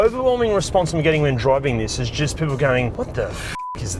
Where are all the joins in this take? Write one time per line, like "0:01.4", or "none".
0:02.9